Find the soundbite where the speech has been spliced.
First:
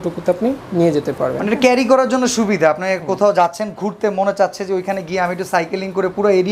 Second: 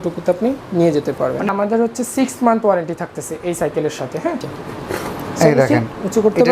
second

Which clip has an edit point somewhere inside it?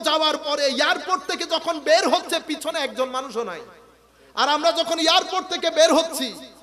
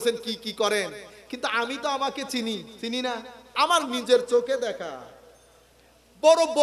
second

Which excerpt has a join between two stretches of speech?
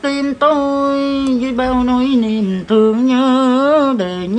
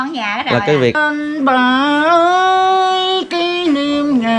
second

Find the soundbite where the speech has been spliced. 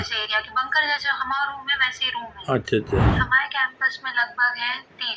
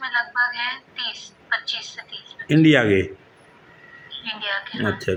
first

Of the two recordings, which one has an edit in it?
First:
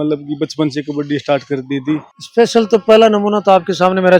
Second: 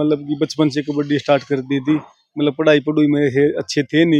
first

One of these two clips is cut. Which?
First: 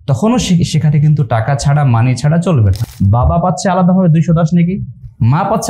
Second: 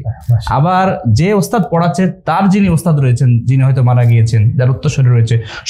first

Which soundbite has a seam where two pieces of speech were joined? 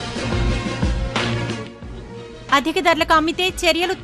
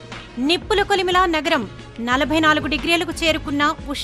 first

